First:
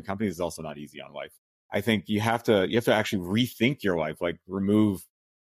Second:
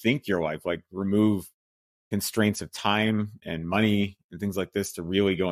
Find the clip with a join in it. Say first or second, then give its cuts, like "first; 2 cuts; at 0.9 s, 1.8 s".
first; 1 cut; at 1.2 s